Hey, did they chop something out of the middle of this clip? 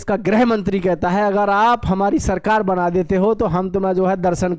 no; 0 cuts

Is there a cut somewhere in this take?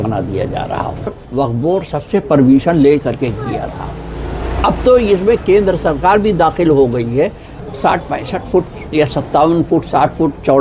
yes; 2 cuts; at 1.2 s, 7.6 s

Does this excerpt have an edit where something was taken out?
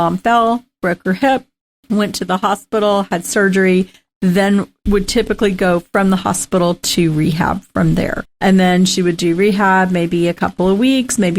yes; 1 cut; at 4.7 s

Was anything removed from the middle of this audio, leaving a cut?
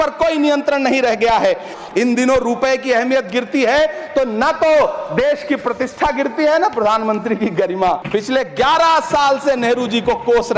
yes; 2 cuts; at 1.8 s, 8.0 s

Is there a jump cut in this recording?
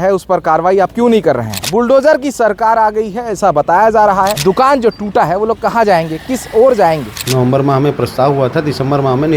yes; 3 cuts; at 1.5 s, 4.3 s, 7.2 s

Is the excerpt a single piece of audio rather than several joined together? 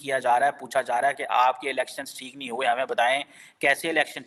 yes; 0 cuts

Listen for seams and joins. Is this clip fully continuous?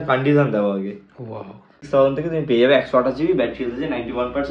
no; 1 cut; at 1.8 s

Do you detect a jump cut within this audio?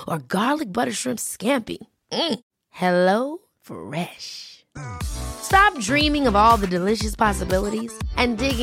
no; 0 cuts

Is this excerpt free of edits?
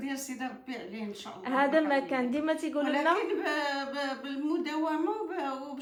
yes; 0 cuts

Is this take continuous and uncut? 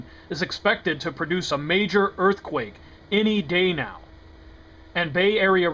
no; 1 cut; at 3.8 s

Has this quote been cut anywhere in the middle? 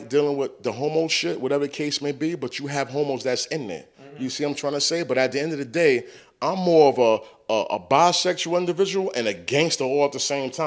no; 0 cuts

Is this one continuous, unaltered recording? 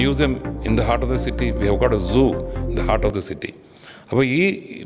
yes; 0 cuts

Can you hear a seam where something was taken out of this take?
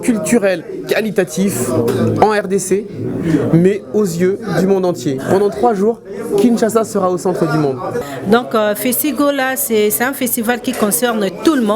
yes; 1 cut; at 8.0 s

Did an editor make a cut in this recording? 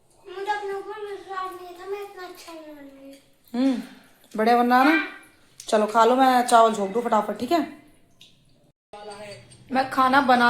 no; 0 cuts

